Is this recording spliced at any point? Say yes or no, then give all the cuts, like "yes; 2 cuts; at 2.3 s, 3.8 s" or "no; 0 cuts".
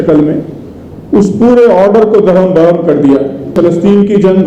yes; 1 cut; at 3.5 s